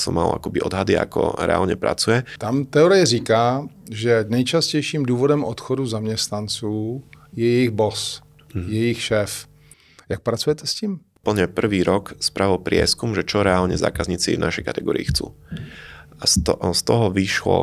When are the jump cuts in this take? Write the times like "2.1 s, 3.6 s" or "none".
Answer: 2.3 s, 11.1 s